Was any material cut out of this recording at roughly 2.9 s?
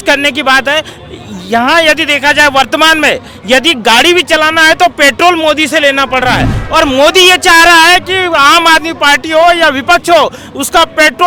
no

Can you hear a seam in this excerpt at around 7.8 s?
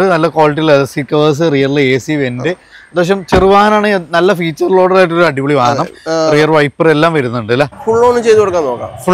yes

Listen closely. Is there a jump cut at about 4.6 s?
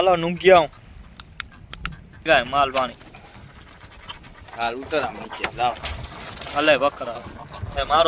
no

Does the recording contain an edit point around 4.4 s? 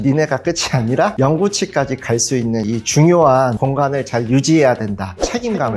no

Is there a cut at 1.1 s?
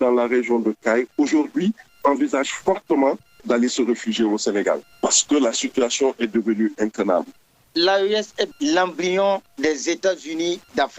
no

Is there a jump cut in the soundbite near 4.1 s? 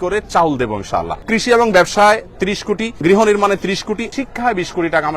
yes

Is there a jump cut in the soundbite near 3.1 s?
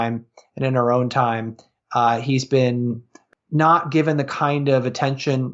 yes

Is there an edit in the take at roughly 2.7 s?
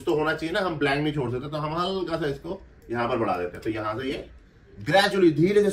no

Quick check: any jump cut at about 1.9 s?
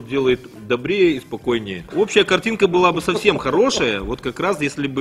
yes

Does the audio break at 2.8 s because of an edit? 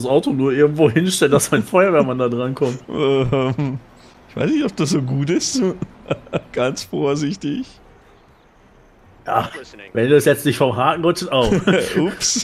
no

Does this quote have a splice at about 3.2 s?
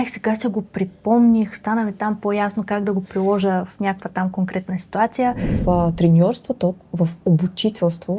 no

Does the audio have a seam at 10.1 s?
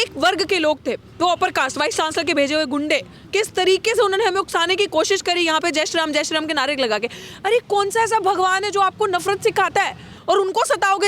yes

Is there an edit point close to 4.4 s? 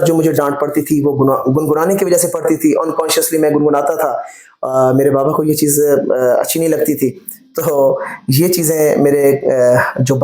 no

